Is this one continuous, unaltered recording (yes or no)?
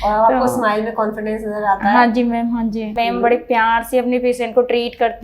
no